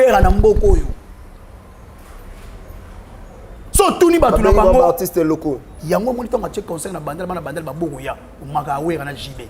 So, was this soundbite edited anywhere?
yes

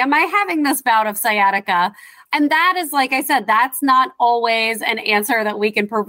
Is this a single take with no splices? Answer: no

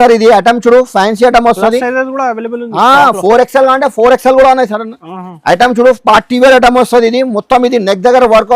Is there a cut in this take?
no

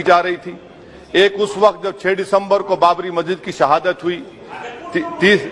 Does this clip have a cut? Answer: no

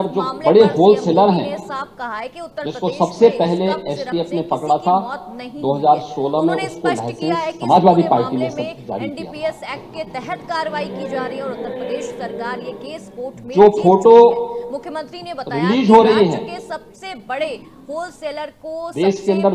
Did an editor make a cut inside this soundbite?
no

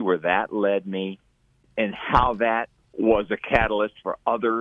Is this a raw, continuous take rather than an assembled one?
no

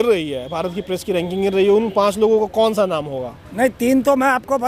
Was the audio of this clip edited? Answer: no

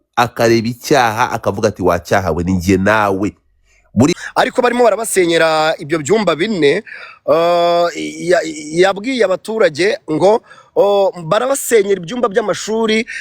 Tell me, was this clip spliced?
yes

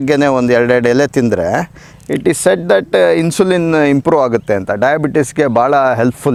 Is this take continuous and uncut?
yes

